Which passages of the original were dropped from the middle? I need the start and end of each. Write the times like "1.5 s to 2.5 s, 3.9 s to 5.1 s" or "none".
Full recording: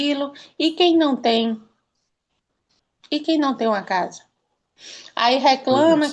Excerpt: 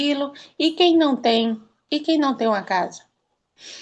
1.7 s to 2.9 s